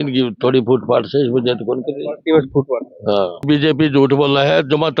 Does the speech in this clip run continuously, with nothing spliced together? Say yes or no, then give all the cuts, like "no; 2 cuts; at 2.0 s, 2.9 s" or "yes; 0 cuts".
no; 1 cut; at 3.4 s